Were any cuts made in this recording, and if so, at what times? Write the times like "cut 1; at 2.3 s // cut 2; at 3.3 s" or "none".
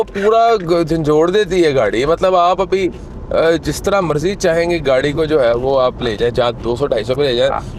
none